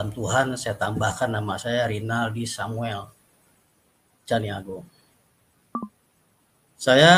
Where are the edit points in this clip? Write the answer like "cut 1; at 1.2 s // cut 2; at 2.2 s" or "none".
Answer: none